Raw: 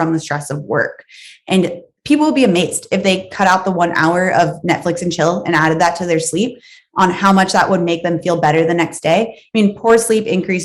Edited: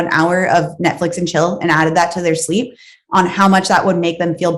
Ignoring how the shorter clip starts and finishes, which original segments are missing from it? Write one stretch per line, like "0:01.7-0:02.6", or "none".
none